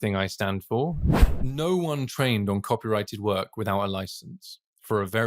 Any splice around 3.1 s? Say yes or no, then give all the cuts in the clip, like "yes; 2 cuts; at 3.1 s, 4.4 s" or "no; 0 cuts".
no; 1 cut; at 1.1 s